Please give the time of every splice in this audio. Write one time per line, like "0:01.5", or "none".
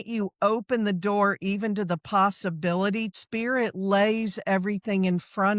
0:03.1